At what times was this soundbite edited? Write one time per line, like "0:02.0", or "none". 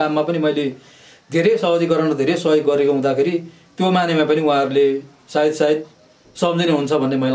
none